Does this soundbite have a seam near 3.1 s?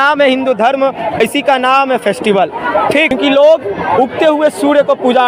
yes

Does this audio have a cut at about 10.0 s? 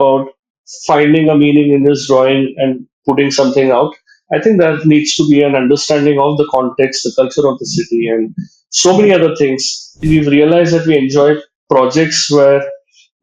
yes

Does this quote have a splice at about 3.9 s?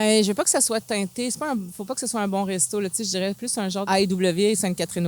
yes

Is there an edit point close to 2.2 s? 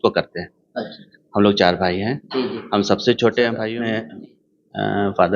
no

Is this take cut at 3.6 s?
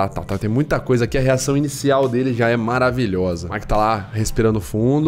yes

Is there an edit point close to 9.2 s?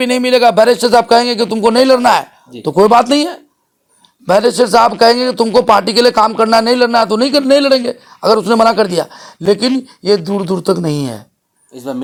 no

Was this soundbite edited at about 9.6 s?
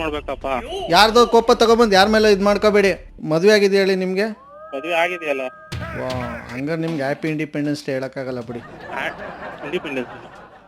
no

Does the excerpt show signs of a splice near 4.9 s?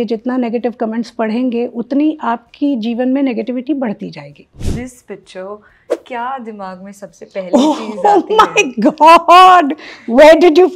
yes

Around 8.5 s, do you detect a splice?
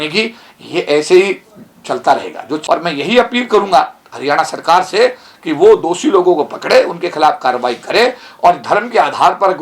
no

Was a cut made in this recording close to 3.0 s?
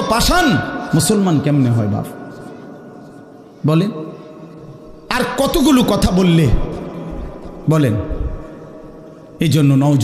no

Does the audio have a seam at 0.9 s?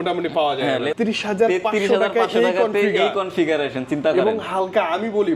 yes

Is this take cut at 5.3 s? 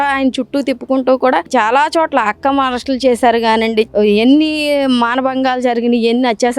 no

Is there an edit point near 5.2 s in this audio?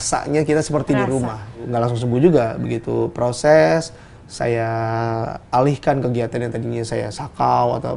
no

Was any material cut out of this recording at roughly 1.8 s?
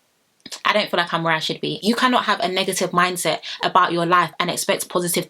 yes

